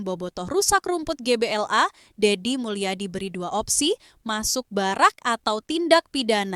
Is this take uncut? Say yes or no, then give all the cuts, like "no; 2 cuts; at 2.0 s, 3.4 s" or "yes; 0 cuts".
yes; 0 cuts